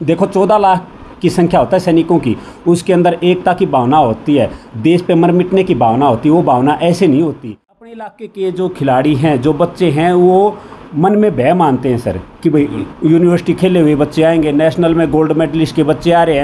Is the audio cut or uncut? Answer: cut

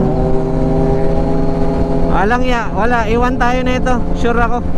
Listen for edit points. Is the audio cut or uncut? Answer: uncut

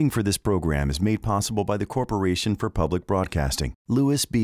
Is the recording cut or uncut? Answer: uncut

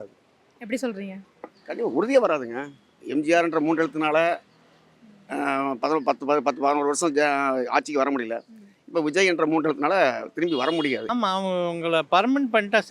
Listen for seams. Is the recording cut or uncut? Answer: cut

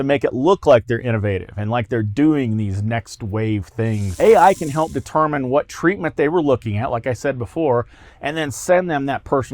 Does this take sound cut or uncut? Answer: cut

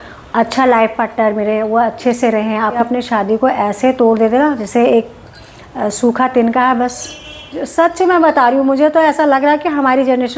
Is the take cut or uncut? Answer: cut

